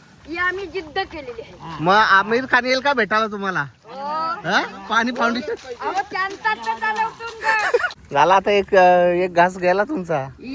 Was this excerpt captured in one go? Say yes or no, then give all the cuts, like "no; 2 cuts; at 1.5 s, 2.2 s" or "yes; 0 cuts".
no; 1 cut; at 8.0 s